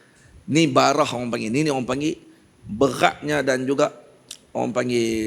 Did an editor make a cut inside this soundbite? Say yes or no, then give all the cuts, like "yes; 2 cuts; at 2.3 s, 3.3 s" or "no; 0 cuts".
no; 0 cuts